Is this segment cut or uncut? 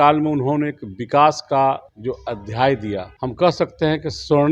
cut